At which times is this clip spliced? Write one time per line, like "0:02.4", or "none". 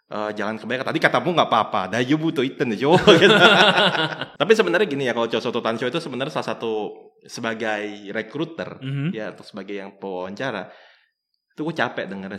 0:04.2